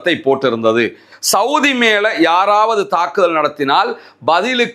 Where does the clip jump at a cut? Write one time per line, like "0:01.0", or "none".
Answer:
0:01.1